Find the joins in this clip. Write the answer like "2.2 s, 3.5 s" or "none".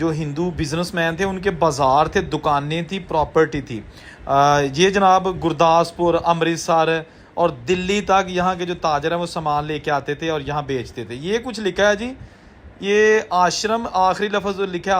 none